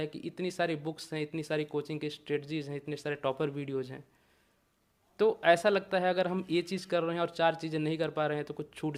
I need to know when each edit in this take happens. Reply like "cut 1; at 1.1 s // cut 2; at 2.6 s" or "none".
none